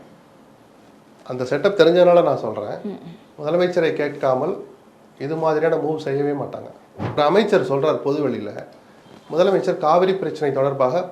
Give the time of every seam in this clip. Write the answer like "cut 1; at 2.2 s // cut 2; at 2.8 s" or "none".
cut 1; at 7.0 s